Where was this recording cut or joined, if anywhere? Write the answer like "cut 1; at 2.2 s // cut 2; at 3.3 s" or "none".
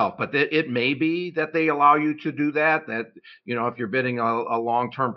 none